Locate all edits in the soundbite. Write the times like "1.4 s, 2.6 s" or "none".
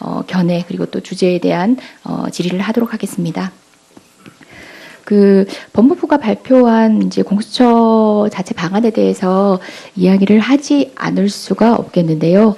none

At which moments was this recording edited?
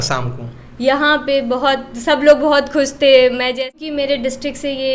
3.8 s

